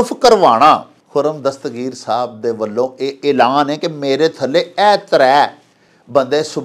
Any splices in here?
yes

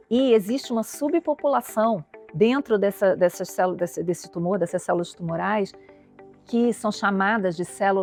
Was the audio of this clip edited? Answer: no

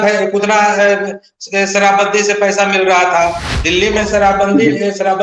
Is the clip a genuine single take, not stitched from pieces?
no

